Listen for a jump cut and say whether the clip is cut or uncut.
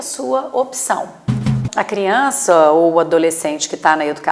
cut